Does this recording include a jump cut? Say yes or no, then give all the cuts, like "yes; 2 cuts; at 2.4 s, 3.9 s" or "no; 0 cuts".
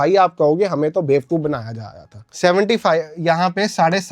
no; 0 cuts